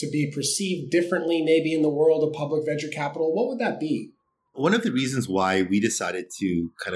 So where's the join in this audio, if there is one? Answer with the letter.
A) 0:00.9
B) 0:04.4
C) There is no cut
C